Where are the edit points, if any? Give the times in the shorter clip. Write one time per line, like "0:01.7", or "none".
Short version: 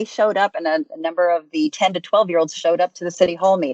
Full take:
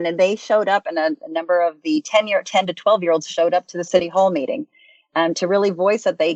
0:01.7

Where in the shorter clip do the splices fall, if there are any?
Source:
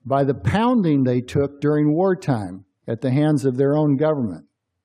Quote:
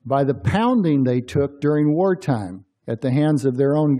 none

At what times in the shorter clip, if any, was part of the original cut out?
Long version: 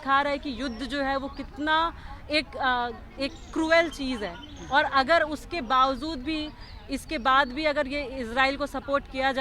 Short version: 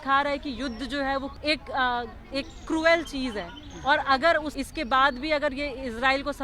0:01.3
0:04.5

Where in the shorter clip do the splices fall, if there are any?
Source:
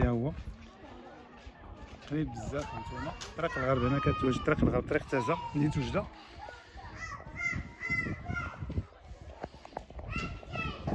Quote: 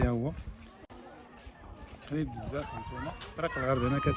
none

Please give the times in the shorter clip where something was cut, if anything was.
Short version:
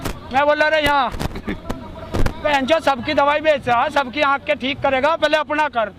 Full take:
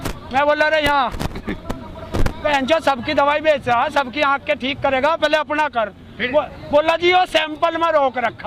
none

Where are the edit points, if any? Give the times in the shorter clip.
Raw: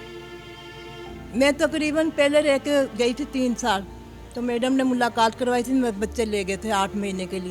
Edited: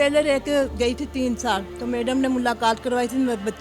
0:01.7

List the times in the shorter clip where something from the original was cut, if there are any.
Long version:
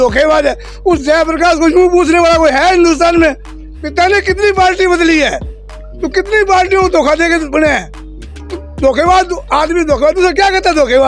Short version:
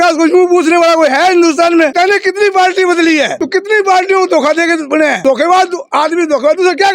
0:01.9
0:03.4
0:05.2

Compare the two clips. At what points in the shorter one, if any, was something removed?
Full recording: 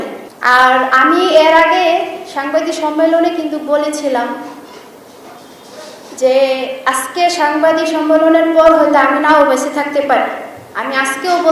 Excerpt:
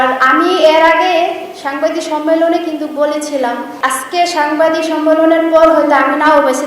0:03.7

